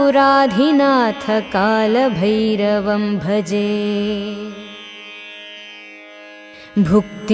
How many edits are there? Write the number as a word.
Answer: one